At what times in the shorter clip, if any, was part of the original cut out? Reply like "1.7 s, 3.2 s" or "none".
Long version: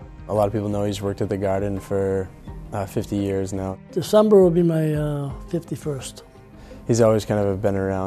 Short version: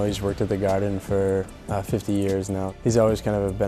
1.6 s, 2.7 s